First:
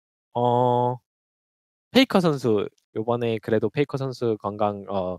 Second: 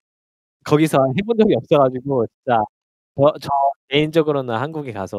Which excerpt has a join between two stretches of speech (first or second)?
first